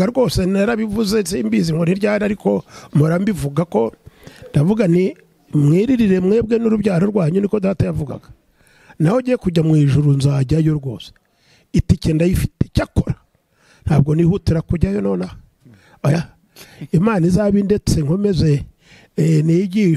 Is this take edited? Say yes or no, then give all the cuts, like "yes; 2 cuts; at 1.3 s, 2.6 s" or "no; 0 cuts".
no; 0 cuts